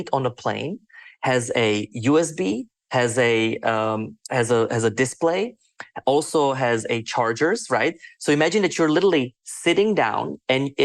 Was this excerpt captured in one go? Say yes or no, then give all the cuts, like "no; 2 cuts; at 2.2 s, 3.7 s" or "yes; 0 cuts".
yes; 0 cuts